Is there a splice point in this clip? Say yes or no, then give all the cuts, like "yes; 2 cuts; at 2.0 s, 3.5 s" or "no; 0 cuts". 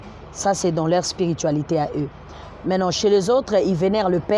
no; 0 cuts